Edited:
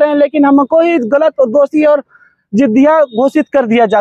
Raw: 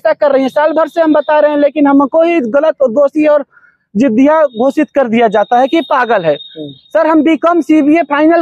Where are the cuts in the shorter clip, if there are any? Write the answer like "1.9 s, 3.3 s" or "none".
none